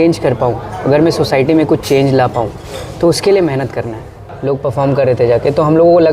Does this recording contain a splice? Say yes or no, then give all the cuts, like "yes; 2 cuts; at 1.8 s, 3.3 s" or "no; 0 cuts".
yes; 1 cut; at 4.3 s